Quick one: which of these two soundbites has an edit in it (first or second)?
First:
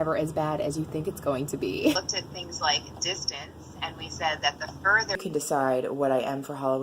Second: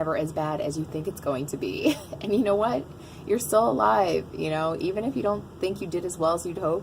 first